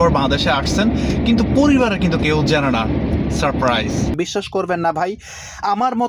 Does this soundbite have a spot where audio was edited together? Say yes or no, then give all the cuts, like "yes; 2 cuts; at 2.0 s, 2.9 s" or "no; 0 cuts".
yes; 1 cut; at 4.1 s